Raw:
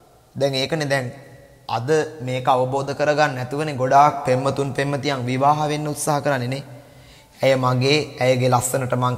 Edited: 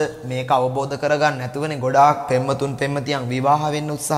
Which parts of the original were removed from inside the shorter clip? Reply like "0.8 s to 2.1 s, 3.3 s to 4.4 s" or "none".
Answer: none